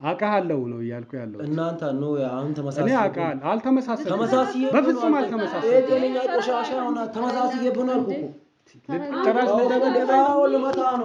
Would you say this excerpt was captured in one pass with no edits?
yes; 0 cuts

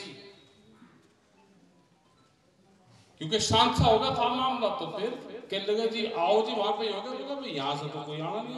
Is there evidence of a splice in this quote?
no; 0 cuts

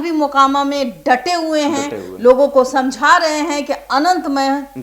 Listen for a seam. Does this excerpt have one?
no; 0 cuts

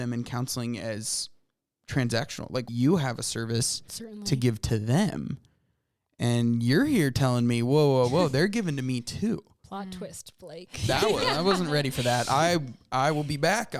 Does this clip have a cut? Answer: yes; 1 cut; at 2.7 s

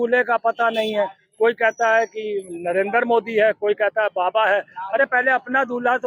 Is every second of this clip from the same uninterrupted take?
yes; 0 cuts

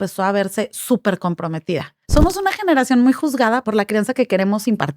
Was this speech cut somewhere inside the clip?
yes; 2 cuts; at 2.0 s, 3.6 s

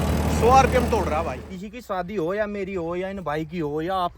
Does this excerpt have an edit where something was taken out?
yes; 1 cut; at 1.3 s

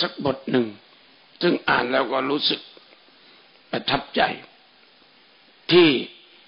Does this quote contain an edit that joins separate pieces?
no; 0 cuts

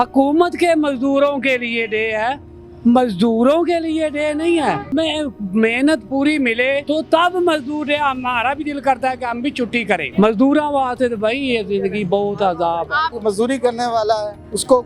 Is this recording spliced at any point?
yes; 4 cuts; at 4.9 s, 6.8 s, 10.1 s, 13.2 s

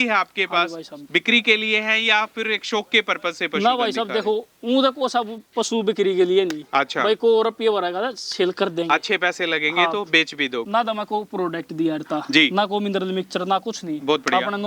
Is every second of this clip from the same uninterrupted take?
no; 1 cut; at 10.6 s

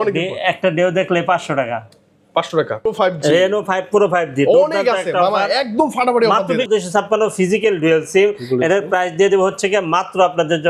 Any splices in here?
yes; 2 cuts; at 2.9 s, 6.7 s

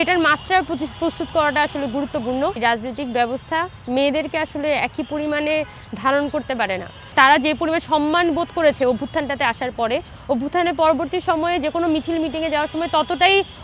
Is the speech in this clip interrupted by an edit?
yes; 2 cuts; at 2.6 s, 7.1 s

